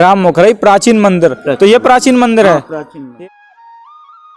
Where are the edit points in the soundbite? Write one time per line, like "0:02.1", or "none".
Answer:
0:03.1